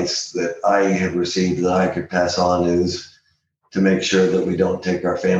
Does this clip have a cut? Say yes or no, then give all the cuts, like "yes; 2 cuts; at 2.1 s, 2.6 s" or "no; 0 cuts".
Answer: no; 0 cuts